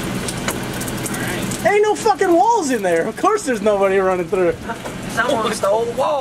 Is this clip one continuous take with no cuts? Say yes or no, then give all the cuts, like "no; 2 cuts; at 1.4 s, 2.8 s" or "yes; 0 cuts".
yes; 0 cuts